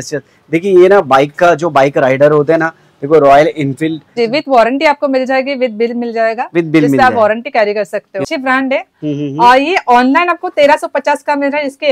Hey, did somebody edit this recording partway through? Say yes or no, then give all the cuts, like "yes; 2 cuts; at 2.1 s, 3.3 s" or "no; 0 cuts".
yes; 2 cuts; at 4.2 s, 8.2 s